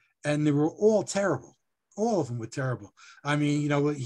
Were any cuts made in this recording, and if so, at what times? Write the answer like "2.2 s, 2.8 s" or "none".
none